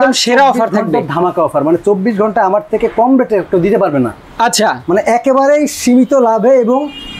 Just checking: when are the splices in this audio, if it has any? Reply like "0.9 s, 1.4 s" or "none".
none

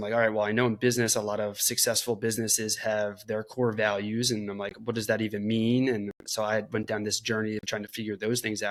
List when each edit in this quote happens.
none

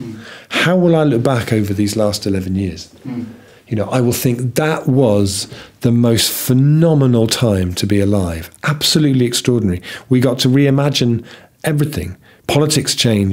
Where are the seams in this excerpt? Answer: none

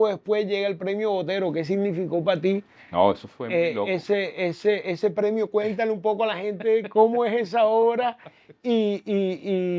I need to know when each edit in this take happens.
none

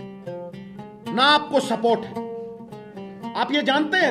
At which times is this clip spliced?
2.2 s, 3.3 s

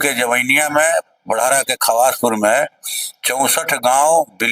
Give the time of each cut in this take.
none

